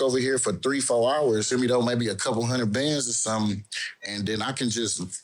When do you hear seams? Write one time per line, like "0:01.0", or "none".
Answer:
0:01.5